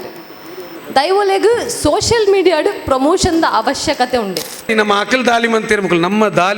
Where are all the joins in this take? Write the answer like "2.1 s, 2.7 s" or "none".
4.7 s